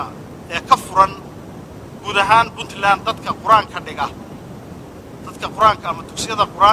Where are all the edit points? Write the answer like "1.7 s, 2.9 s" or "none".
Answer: none